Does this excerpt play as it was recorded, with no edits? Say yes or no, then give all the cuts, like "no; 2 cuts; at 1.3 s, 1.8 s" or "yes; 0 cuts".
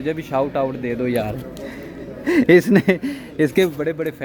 yes; 0 cuts